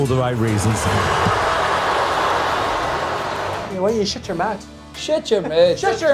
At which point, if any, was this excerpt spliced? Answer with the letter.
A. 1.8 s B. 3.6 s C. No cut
B